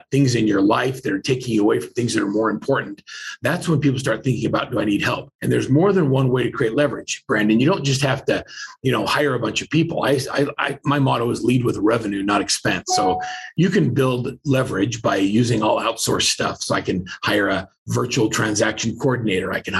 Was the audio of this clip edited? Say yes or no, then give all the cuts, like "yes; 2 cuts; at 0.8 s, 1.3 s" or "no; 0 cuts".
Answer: yes; 2 cuts; at 5.3 s, 13.4 s